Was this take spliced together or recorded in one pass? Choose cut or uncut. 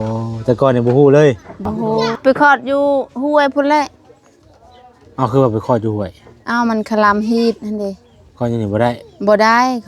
cut